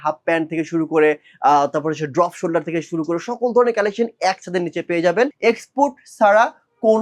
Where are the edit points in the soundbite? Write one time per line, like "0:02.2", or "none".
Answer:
0:05.3